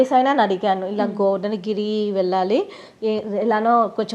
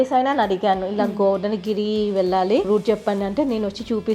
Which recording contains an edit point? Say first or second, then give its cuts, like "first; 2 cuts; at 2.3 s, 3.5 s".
second; 1 cut; at 2.7 s